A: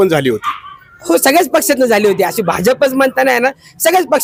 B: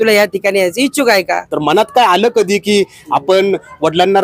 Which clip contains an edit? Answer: B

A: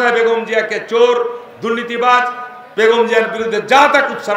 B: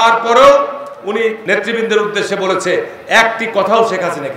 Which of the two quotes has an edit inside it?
B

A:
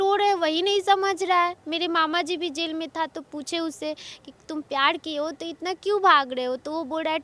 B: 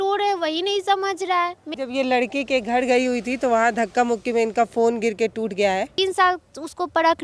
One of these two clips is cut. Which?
B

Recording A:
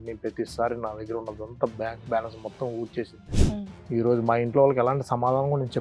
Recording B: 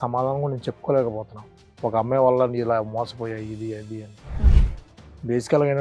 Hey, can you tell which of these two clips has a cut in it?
A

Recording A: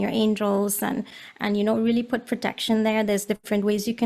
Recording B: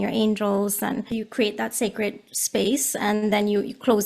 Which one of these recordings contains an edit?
B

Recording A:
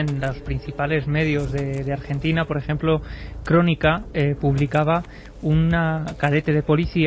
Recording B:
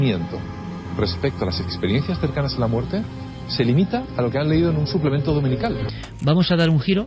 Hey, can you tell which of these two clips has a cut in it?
B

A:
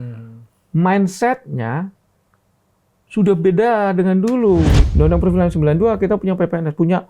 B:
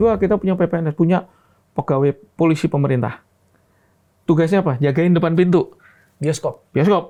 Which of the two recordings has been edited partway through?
A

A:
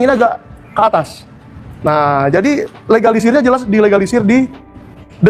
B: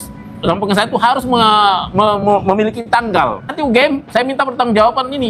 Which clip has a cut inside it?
B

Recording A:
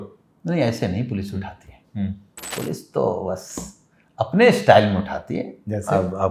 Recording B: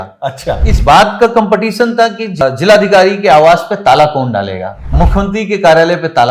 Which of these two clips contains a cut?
B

